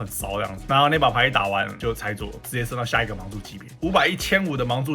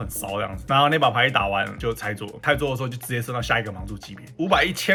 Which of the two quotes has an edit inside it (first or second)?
first